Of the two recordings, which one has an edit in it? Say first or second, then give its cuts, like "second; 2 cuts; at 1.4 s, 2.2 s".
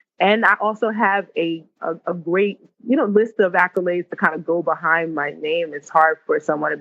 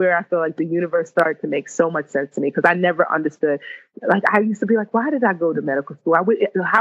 first; 2 cuts; at 1.8 s, 2.6 s